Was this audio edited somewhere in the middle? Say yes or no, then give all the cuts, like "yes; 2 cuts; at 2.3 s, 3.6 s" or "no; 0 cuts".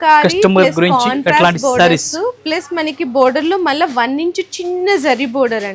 no; 0 cuts